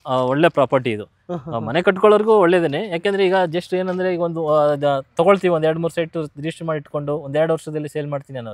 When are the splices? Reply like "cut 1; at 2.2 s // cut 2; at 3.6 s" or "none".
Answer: none